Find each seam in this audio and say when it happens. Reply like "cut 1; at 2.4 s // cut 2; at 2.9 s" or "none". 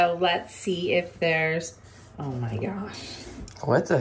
none